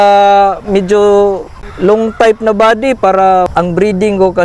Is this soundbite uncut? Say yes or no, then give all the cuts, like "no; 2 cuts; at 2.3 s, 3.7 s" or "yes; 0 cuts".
no; 2 cuts; at 1.6 s, 3.5 s